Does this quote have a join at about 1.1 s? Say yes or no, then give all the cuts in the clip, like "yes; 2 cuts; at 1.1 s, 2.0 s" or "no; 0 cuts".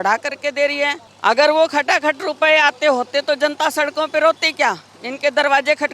yes; 1 cut; at 1.1 s